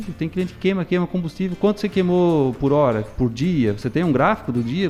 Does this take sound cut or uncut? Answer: uncut